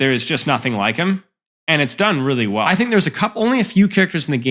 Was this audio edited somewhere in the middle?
yes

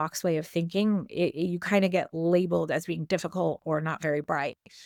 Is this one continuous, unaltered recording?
yes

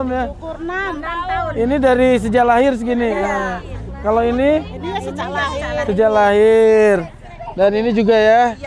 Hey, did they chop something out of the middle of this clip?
no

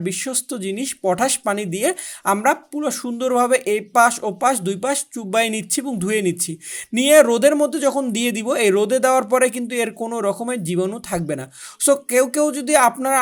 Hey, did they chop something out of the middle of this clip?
no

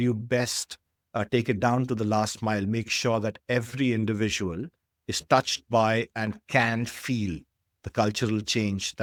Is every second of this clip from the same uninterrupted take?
yes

